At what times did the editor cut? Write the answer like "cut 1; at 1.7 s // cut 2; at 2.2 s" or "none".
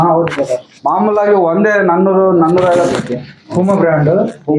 cut 1; at 2.9 s

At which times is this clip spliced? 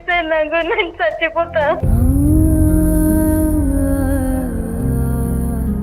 cut 1; at 1.8 s

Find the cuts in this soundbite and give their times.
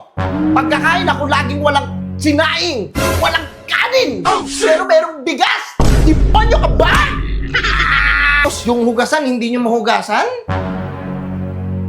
cut 1; at 8.4 s

